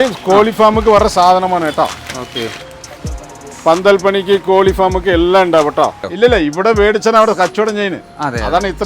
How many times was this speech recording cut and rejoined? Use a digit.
1